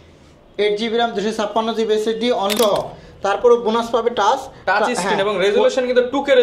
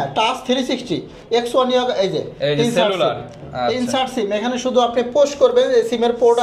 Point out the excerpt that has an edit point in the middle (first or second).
first